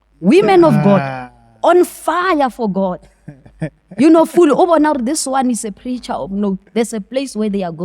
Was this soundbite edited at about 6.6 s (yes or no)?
no